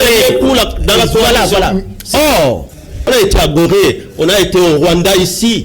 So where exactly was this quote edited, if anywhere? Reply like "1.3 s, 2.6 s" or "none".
2.9 s